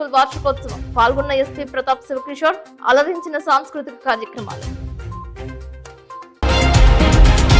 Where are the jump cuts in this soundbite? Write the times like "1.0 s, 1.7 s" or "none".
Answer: 6.4 s